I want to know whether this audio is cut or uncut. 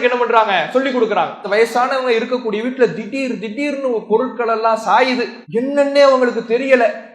cut